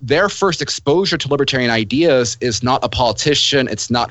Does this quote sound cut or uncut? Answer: uncut